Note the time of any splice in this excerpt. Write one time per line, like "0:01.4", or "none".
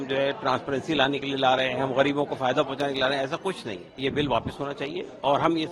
0:04.0

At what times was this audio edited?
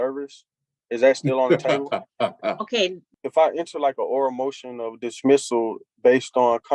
0:03.1

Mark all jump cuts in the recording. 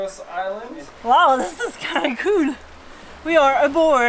0:00.9

